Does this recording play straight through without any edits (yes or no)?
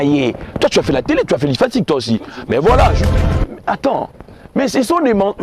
no